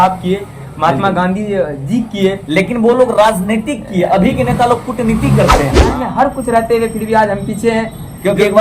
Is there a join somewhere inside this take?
yes; 1 cut; at 5.9 s

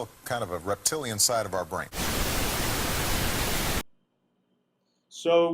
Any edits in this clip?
yes; 2 cuts; at 1.9 s, 3.8 s

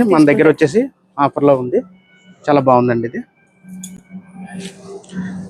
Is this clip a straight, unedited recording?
yes; 0 cuts

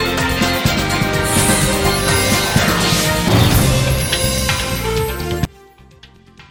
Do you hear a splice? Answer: no; 0 cuts

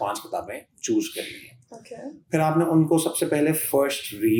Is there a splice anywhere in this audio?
no; 0 cuts

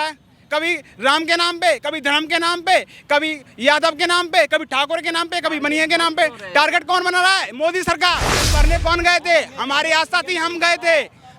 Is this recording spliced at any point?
yes; 1 cut; at 8.5 s

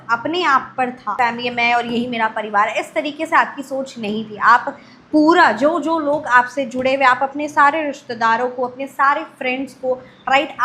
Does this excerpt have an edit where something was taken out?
yes; 1 cut; at 1.1 s

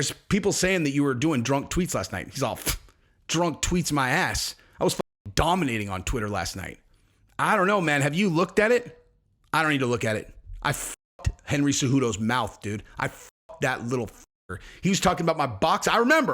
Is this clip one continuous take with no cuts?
yes; 0 cuts

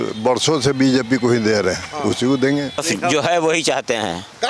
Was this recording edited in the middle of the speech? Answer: yes; 1 cut; at 2.8 s

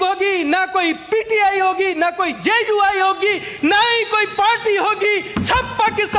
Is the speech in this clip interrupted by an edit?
no; 0 cuts

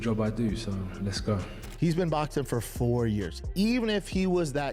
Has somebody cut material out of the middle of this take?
yes; 1 cut; at 1.6 s

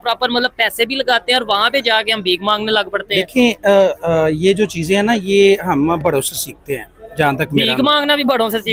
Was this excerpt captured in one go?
yes; 0 cuts

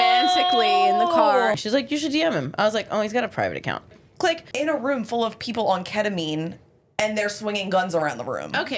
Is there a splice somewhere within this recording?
yes; 2 cuts; at 1.5 s, 4.3 s

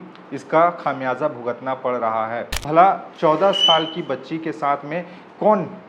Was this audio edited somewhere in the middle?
yes; 1 cut; at 2.6 s

